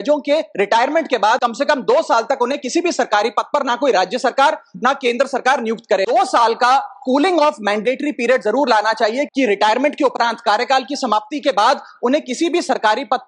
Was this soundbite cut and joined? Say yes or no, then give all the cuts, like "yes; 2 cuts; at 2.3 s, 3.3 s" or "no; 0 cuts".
yes; 3 cuts; at 1.5 s, 6.1 s, 9.3 s